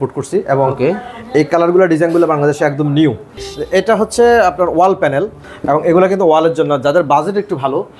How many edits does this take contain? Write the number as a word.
two